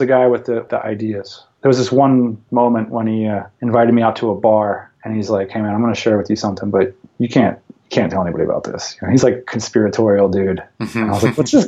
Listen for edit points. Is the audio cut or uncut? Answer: cut